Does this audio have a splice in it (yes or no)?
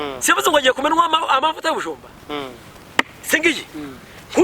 yes